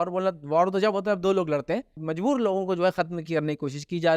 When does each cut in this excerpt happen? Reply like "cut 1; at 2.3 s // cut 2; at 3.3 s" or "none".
cut 1; at 2.1 s